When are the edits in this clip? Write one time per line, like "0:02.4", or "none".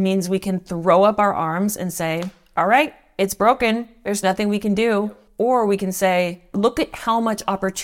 0:05.2
0:06.5